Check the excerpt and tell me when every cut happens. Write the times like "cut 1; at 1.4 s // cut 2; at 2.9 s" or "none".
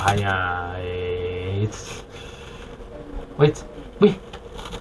none